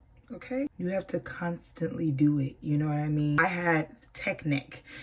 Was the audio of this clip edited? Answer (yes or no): yes